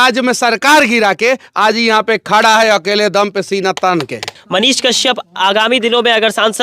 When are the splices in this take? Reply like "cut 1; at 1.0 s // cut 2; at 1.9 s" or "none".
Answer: cut 1; at 4.3 s